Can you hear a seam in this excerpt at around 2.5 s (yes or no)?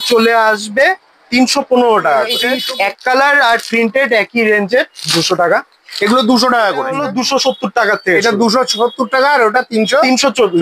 yes